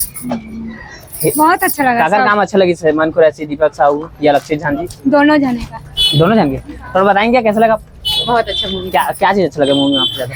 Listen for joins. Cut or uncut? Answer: uncut